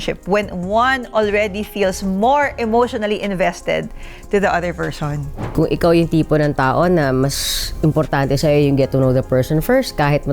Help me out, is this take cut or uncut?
cut